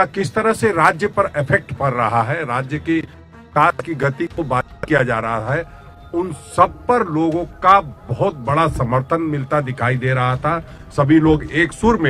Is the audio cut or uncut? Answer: uncut